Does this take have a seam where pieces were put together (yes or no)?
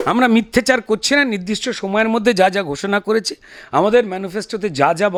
no